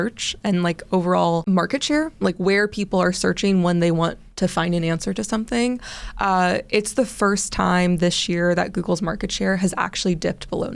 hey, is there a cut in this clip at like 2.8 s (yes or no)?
no